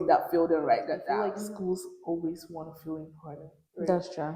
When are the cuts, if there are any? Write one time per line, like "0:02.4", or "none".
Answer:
0:01.2